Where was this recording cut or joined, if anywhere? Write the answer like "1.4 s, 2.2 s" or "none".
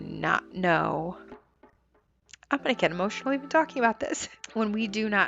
4.4 s